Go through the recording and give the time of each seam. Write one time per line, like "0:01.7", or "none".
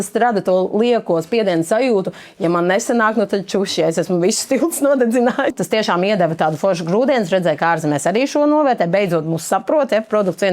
0:05.5